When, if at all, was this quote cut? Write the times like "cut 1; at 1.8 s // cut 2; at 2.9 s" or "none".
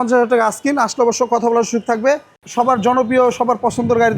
cut 1; at 2.4 s